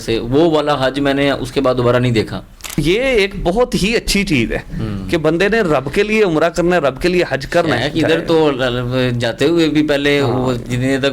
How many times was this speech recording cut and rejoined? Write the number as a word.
one